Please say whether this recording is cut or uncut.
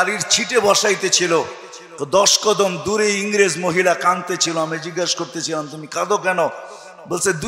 uncut